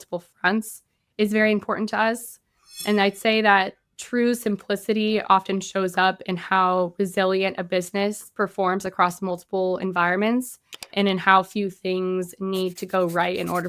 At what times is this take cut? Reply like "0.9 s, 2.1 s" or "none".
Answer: 2.8 s, 10.9 s